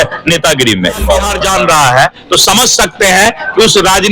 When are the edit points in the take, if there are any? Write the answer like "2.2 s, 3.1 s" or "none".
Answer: 1.3 s